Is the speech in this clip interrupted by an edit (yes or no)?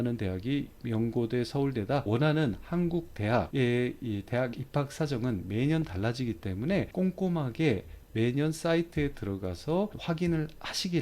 yes